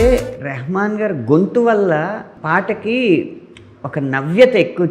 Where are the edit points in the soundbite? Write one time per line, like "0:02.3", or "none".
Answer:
0:02.3